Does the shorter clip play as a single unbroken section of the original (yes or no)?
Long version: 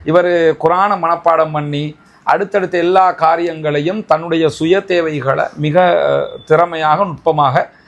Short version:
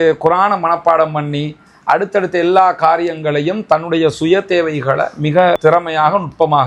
no